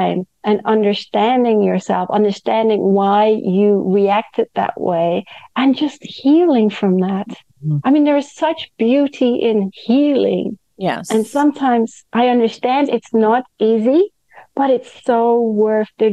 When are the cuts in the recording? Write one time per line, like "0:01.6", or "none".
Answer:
none